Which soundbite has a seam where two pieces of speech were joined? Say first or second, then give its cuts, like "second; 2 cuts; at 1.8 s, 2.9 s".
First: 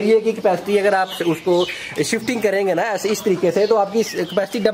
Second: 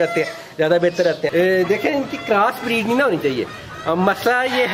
second; 1 cut; at 1.2 s